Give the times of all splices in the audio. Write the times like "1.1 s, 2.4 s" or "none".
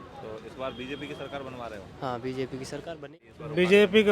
3.0 s